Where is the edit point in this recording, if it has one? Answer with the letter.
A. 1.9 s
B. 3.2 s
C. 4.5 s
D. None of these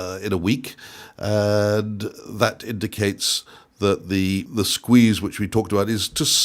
C